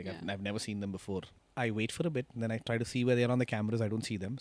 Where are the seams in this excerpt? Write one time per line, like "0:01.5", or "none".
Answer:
0:01.4